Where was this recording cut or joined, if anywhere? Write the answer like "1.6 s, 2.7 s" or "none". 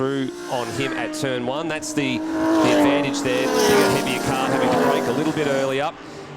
none